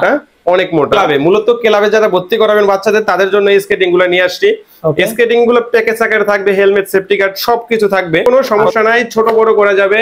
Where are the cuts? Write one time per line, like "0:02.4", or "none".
0:00.9
0:08.2